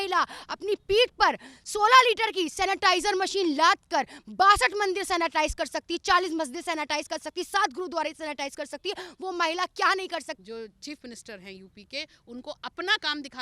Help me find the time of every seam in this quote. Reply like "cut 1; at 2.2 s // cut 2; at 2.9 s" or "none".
cut 1; at 10.3 s